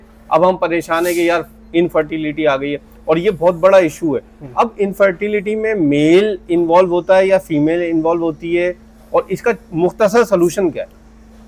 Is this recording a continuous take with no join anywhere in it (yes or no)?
yes